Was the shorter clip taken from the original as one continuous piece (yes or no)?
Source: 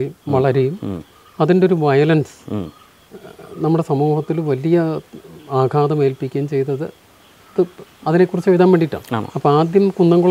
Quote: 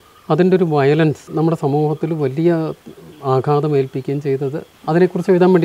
no